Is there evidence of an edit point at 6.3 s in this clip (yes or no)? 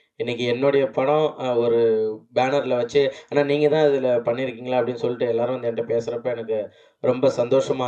no